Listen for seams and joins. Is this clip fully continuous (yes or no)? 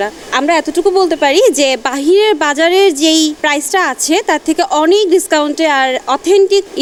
yes